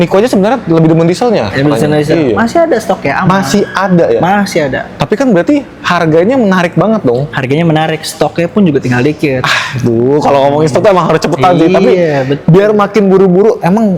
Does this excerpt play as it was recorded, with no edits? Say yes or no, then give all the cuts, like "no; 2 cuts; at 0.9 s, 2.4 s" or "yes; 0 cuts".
yes; 0 cuts